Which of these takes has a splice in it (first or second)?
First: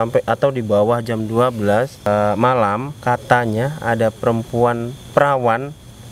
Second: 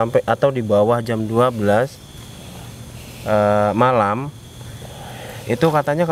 first